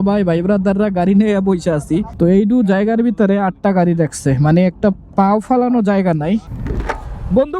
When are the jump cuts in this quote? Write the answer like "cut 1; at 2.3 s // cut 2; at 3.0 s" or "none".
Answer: cut 1; at 2.1 s // cut 2; at 6.6 s